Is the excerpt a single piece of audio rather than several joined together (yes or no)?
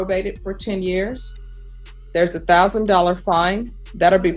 yes